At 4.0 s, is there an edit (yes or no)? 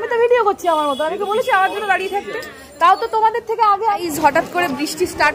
yes